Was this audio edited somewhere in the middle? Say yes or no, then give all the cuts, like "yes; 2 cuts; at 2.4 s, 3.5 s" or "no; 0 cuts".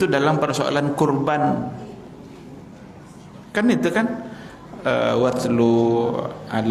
no; 0 cuts